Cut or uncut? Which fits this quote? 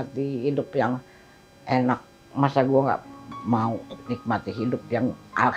uncut